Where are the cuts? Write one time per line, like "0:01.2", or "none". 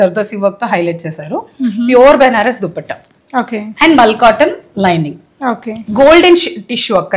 none